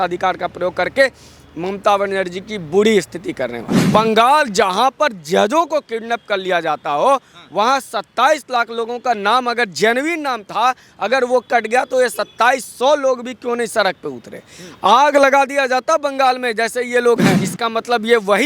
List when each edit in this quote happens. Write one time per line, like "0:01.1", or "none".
0:03.9
0:17.4